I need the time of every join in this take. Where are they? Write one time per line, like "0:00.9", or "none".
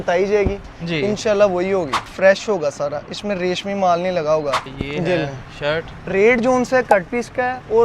0:02.1
0:04.7